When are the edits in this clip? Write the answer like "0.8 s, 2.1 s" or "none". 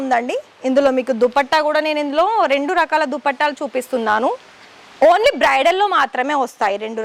none